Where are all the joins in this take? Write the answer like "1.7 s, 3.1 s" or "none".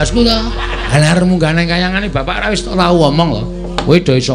0.9 s

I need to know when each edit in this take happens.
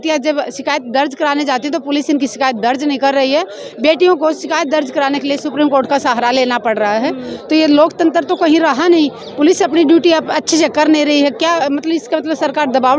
none

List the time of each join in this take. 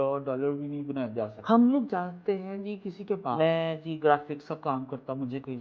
1.3 s, 3.4 s

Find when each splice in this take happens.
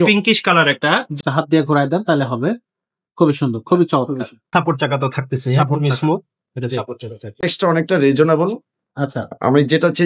1.2 s, 4.4 s, 7.5 s

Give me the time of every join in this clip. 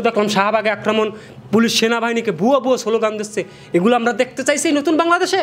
none

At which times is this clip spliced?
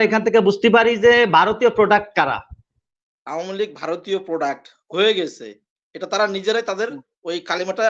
2.8 s

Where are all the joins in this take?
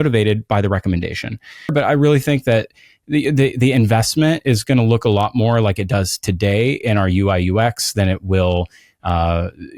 1.7 s

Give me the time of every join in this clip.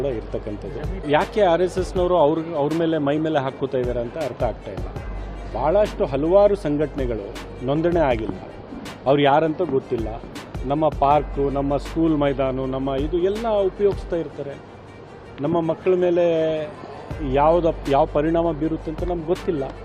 1.0 s

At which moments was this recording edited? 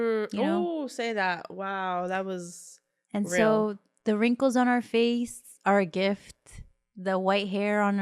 3.9 s

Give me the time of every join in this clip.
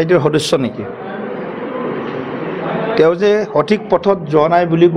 none

